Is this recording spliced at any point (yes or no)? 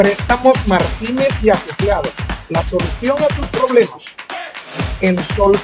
no